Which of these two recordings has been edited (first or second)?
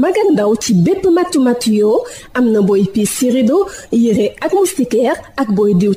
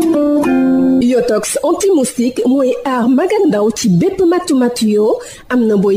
second